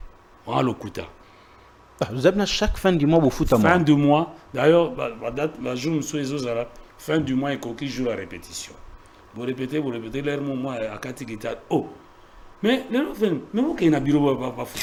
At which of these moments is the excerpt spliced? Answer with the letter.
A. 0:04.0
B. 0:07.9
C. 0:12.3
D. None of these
D